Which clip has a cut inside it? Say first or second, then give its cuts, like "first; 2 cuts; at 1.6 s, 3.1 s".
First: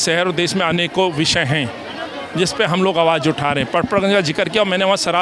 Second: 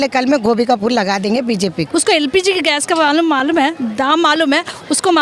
second; 1 cut; at 1.8 s